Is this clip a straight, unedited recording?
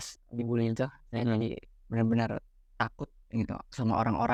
yes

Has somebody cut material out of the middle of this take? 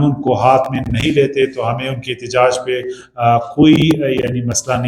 no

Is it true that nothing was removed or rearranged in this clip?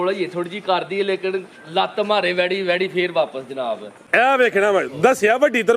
no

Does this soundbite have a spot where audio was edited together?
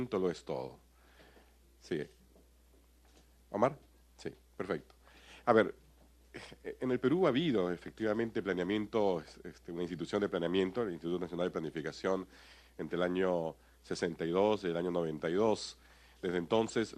no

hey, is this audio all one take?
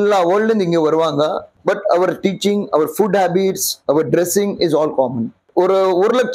no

